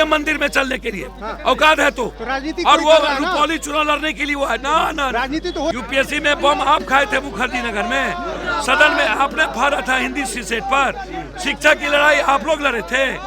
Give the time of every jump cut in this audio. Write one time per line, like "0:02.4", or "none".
0:05.7